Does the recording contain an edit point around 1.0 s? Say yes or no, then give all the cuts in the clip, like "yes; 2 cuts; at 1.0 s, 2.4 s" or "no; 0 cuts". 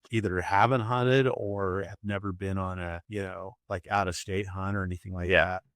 no; 1 cut; at 3.0 s